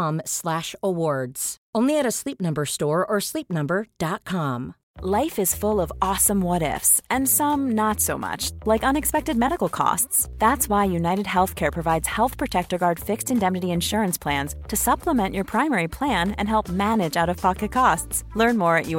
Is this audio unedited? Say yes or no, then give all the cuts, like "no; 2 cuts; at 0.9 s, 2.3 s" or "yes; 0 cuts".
no; 1 cut; at 4.8 s